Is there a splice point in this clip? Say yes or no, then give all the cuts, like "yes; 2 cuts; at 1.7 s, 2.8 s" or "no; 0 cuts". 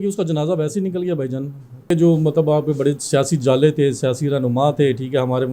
yes; 1 cut; at 1.8 s